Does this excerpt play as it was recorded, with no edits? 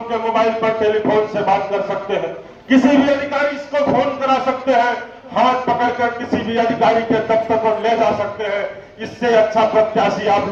yes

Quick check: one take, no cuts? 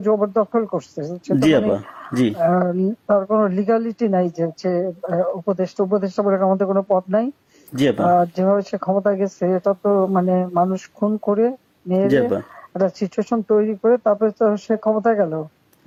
yes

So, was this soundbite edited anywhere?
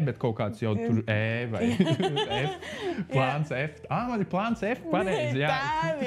no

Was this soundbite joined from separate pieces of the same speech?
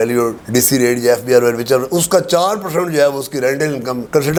no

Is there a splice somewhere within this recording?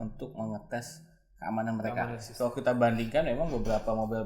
yes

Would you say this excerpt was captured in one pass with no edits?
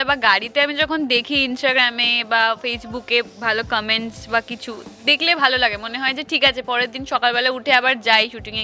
yes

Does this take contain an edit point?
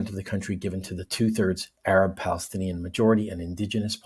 no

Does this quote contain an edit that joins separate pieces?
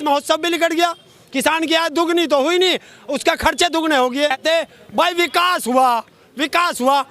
yes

